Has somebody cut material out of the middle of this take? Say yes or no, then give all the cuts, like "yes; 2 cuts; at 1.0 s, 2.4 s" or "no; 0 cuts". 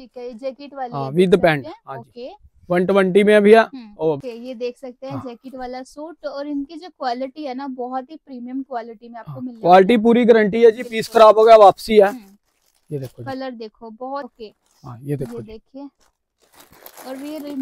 yes; 2 cuts; at 4.3 s, 14.3 s